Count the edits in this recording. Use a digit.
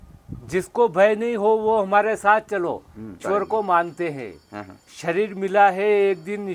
1